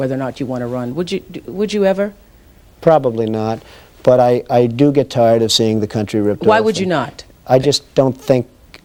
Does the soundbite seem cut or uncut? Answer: uncut